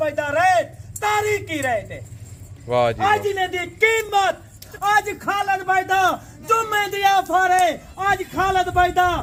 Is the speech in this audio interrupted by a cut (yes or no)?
no